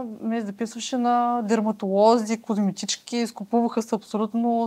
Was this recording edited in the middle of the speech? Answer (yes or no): no